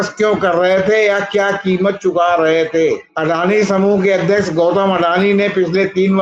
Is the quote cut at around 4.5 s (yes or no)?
no